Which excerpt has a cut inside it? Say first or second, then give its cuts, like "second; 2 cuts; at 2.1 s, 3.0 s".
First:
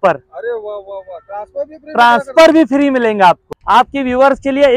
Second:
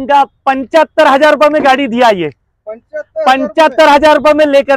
first; 1 cut; at 3.5 s